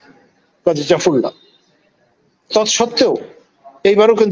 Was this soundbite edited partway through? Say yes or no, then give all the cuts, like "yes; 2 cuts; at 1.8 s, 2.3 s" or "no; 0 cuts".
no; 0 cuts